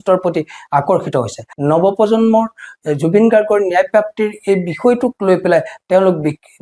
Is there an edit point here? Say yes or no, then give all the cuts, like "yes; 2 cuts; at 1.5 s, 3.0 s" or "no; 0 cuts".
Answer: yes; 1 cut; at 1.5 s